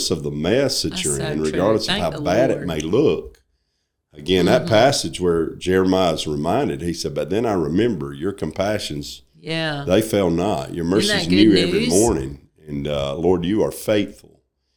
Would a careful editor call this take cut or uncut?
uncut